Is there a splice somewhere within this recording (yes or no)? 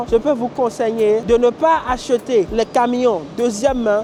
no